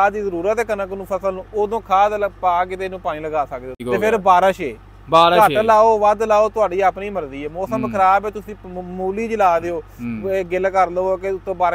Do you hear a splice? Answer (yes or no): yes